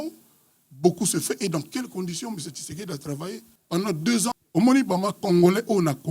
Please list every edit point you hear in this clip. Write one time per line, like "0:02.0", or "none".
0:03.5
0:04.3